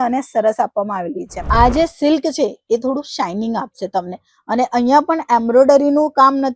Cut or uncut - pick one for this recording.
cut